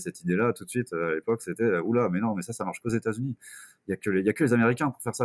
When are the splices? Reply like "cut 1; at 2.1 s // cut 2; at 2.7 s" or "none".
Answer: none